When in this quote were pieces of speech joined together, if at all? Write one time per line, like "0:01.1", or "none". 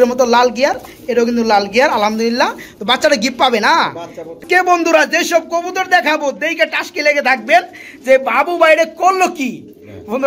0:04.3